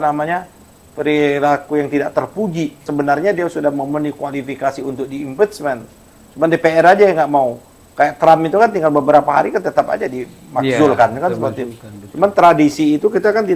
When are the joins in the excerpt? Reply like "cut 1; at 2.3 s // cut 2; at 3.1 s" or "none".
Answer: cut 1; at 2.8 s